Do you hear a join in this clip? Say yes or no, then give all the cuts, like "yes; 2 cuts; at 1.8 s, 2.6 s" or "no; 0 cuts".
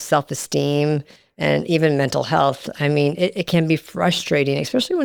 no; 0 cuts